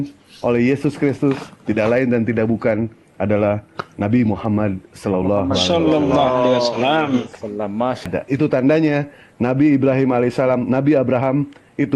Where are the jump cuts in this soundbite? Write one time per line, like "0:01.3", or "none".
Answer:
0:08.1